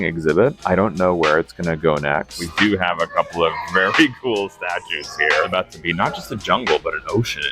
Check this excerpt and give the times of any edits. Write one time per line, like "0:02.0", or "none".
0:02.5
0:05.5

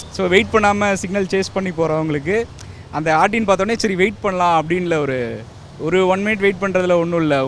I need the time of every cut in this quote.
none

